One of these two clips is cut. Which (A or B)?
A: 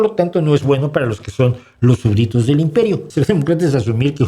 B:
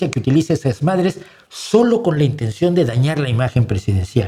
A